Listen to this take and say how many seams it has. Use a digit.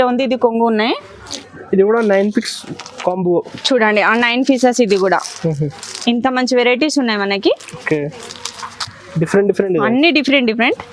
1